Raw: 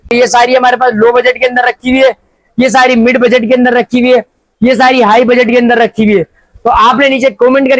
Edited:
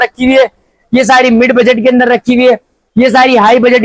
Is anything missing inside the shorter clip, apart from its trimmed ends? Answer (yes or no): no